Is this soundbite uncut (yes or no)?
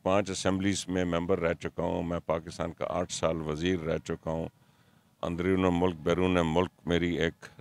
yes